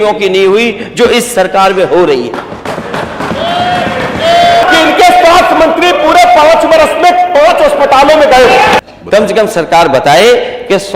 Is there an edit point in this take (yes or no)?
yes